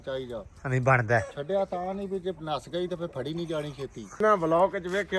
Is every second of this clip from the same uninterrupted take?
no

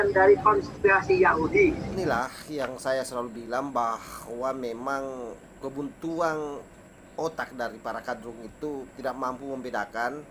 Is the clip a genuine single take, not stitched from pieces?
no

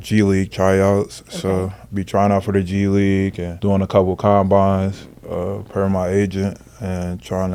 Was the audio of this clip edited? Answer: no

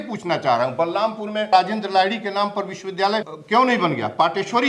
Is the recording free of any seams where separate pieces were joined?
no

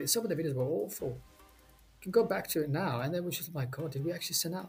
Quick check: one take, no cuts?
yes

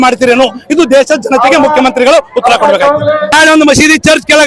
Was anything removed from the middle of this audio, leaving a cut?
yes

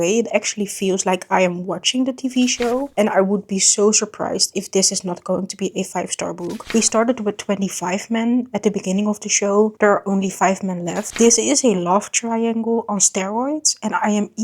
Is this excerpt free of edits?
no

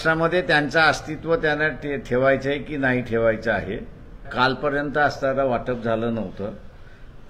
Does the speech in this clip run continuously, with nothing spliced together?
no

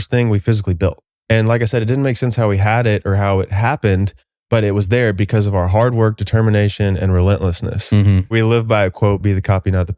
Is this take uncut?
no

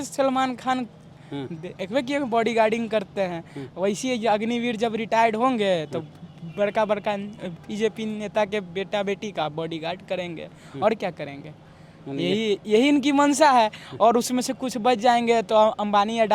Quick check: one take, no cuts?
yes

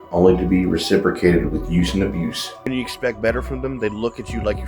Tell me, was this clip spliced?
yes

